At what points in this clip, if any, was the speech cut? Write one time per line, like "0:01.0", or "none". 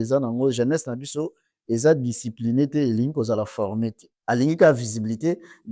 0:04.1